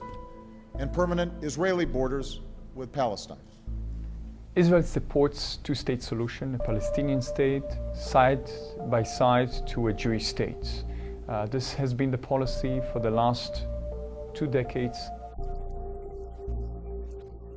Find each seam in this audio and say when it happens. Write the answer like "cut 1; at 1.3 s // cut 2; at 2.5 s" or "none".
none